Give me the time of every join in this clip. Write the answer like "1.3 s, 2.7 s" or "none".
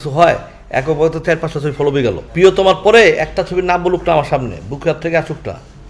2.2 s